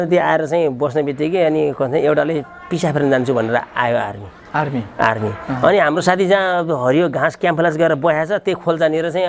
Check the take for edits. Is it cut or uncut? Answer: uncut